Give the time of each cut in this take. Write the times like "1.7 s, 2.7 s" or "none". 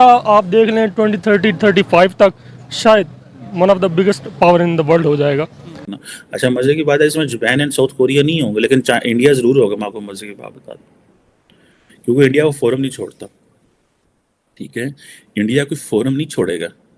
5.9 s